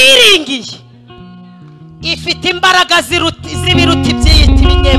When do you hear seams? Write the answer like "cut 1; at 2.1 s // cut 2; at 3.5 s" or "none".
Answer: none